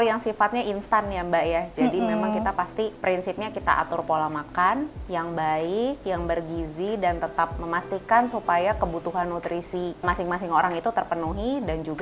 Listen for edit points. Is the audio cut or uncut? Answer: cut